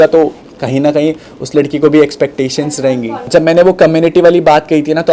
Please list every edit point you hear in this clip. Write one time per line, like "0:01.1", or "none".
0:03.2